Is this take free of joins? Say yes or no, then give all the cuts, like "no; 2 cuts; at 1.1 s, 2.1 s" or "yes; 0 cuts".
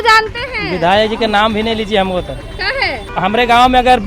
no; 1 cut; at 3.1 s